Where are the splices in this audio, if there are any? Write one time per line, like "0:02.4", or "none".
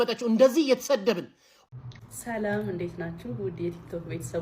0:01.7